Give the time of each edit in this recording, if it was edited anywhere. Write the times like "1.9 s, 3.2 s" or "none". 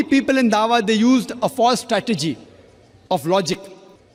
none